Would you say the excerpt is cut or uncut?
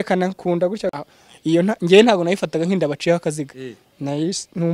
uncut